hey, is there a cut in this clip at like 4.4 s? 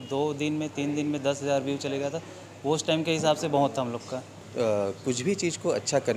yes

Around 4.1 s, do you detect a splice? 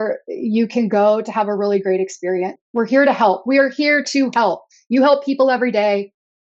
no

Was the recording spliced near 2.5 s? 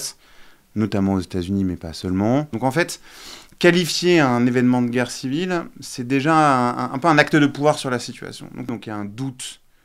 yes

